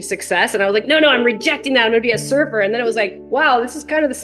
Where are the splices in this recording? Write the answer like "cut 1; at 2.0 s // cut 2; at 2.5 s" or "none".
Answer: none